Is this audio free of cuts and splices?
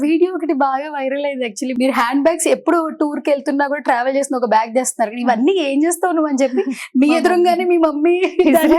no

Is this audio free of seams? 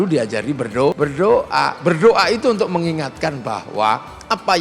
no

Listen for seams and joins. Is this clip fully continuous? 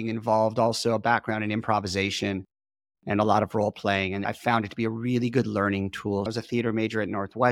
no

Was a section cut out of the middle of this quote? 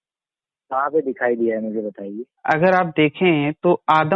no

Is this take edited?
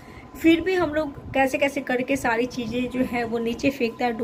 no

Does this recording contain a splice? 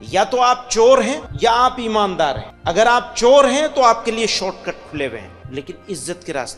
yes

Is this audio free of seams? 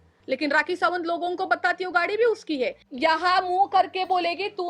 no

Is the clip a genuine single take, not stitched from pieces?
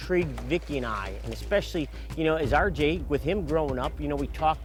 yes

